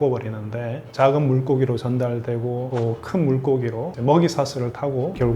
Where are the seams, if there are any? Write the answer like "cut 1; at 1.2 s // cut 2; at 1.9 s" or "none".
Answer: cut 1; at 0.8 s // cut 2; at 2.7 s